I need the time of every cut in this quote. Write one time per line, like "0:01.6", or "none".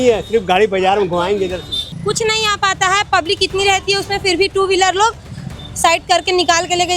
0:01.9